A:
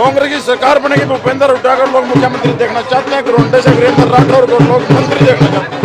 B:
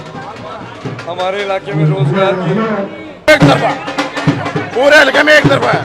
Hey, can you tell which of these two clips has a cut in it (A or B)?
B